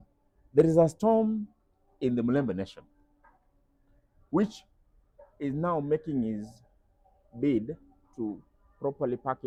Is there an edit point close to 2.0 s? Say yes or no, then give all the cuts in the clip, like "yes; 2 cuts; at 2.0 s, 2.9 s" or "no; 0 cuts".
no; 0 cuts